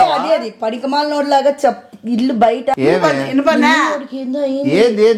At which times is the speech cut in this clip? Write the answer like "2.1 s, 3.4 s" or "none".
2.7 s